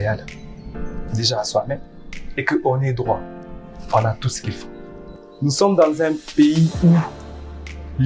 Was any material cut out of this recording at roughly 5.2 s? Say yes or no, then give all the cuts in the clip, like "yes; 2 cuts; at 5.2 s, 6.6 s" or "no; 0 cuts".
yes; 1 cut; at 5.2 s